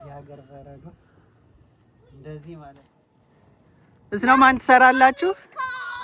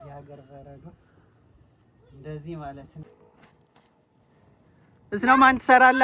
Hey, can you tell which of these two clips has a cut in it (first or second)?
first